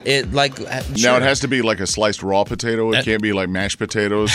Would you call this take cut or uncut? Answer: cut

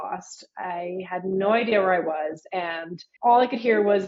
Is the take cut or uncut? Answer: uncut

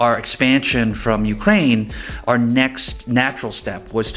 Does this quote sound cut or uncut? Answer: uncut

